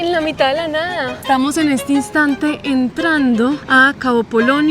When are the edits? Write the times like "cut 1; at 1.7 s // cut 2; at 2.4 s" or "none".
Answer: cut 1; at 1.1 s // cut 2; at 3.6 s